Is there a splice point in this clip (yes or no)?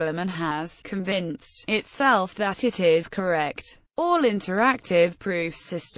yes